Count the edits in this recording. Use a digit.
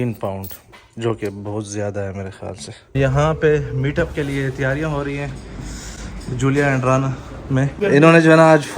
2